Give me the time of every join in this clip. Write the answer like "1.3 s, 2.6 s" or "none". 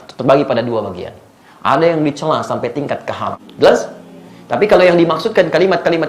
3.4 s